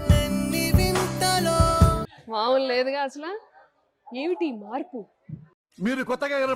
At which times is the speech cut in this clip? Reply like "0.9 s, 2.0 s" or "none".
2.1 s